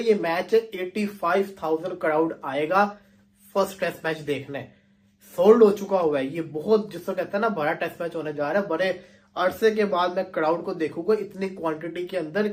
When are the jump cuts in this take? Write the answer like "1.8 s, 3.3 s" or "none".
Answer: none